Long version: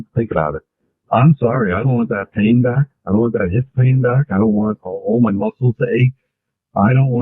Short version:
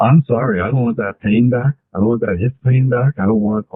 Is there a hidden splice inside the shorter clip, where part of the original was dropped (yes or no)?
no